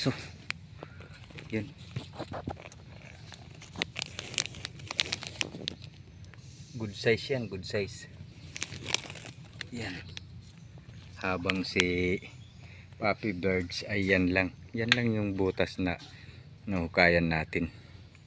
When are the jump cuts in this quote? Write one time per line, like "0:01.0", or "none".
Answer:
none